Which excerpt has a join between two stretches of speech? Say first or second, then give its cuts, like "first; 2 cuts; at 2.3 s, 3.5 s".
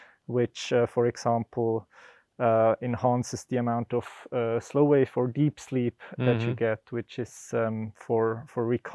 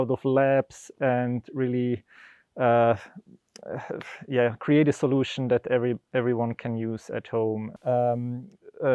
second; 1 cut; at 7.7 s